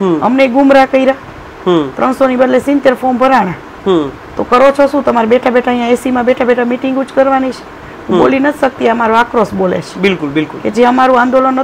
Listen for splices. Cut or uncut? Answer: uncut